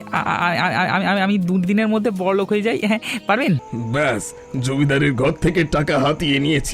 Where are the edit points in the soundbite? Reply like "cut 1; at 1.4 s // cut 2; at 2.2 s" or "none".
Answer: cut 1; at 3.7 s